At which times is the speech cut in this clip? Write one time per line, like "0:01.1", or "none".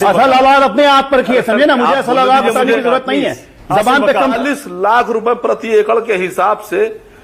0:04.4